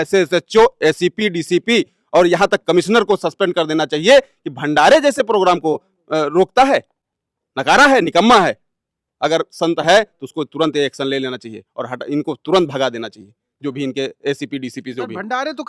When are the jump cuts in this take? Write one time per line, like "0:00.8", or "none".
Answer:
none